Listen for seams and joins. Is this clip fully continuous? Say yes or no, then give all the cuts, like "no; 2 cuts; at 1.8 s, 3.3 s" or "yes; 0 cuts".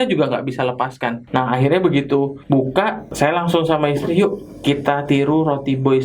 no; 2 cuts; at 1.2 s, 2.6 s